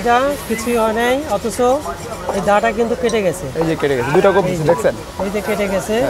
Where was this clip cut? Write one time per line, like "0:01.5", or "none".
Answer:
none